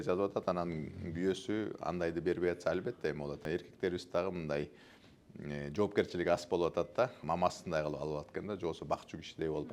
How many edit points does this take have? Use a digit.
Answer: 2